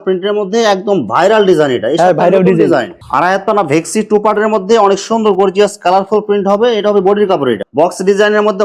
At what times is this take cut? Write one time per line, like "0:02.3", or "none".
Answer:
0:03.0
0:07.6